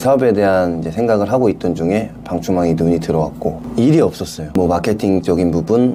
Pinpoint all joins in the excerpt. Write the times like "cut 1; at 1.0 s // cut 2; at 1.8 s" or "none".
cut 1; at 3.6 s // cut 2; at 4.4 s

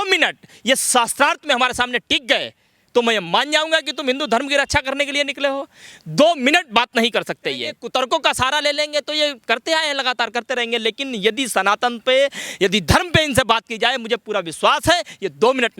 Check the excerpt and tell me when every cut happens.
cut 1; at 7.8 s

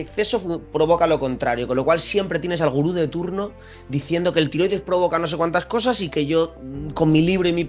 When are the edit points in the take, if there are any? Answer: none

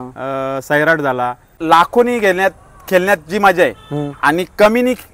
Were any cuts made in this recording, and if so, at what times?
cut 1; at 1.5 s

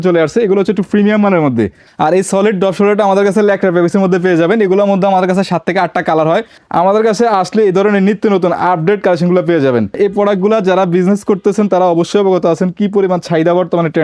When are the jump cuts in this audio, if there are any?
cut 1; at 1.8 s // cut 2; at 6.6 s // cut 3; at 9.9 s

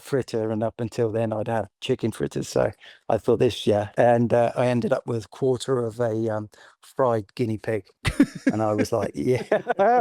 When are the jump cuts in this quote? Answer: cut 1; at 3.9 s

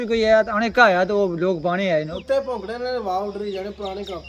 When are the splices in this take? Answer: cut 1; at 2.2 s

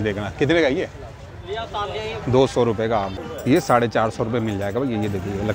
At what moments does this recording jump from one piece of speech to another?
cut 1; at 3.1 s

